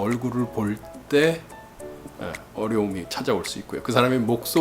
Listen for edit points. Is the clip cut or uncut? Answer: uncut